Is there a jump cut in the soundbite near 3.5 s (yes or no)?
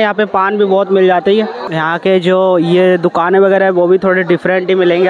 no